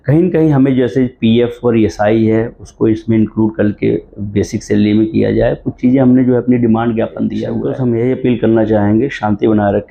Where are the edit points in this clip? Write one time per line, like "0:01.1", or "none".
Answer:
0:07.5